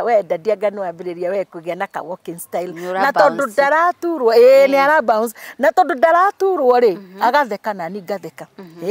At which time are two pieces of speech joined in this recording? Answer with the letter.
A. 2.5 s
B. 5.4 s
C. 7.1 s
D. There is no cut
D